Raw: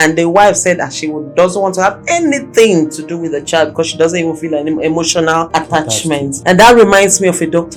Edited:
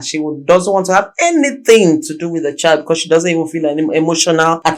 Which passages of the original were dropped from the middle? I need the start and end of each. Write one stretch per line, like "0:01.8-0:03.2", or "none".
none